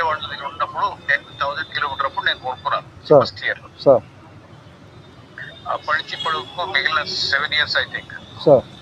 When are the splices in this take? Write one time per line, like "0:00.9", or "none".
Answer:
none